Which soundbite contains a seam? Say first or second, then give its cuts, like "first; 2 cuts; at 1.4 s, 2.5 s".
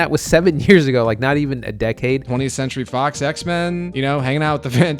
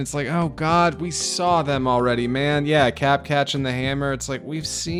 first; 2 cuts; at 2.2 s, 3.9 s